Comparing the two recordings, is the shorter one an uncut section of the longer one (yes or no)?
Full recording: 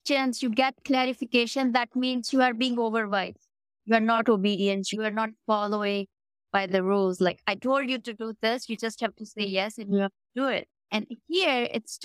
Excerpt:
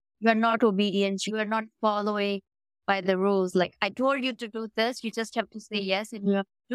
yes